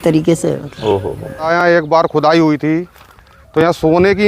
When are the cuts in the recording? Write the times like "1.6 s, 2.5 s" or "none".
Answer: 1.5 s